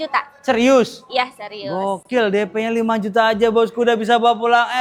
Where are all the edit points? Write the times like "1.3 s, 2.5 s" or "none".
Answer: none